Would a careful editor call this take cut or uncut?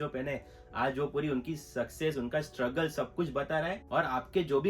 cut